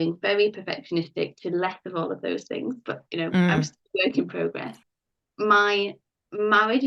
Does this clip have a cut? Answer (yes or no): yes